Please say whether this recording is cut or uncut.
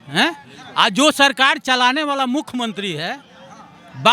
uncut